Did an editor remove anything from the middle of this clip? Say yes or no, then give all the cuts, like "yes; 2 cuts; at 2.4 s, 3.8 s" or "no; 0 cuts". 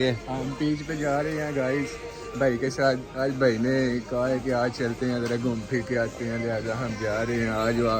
no; 0 cuts